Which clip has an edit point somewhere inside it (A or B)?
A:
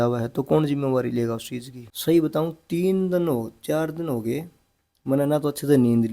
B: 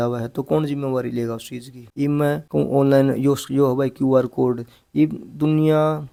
A